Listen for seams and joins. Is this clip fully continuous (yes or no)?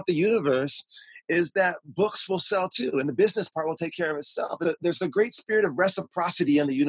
no